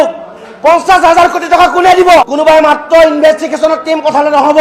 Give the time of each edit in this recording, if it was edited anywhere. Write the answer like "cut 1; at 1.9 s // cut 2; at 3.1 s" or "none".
cut 1; at 2.2 s